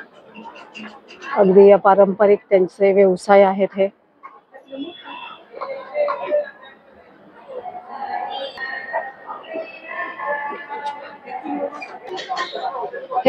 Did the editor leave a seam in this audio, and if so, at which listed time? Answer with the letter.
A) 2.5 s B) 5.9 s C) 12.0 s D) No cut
C